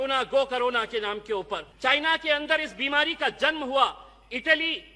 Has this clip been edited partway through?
yes; 1 cut; at 1.7 s

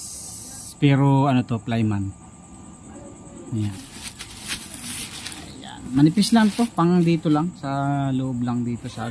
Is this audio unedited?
no; 1 cut; at 3.7 s

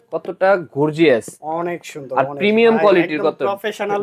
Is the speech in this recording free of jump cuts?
yes; 0 cuts

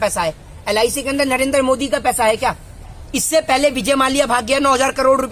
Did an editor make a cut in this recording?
no; 0 cuts

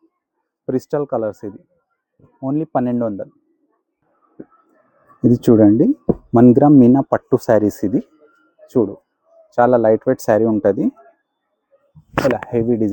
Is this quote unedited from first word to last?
yes; 0 cuts

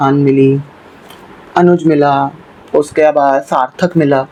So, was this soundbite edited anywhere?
no; 0 cuts

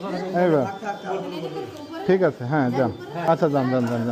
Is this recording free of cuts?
no; 1 cut; at 3.1 s

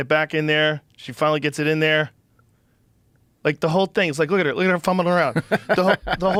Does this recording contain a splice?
no; 0 cuts

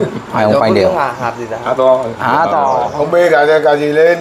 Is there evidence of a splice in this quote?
yes; 1 cut; at 2.9 s

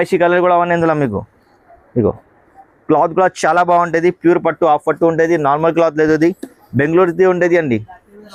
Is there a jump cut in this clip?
no; 0 cuts

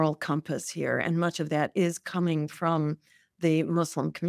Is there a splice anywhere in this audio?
no; 0 cuts

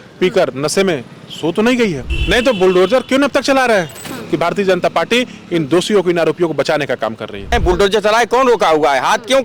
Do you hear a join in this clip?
yes; 3 cuts; at 2.1 s, 4.2 s, 7.5 s

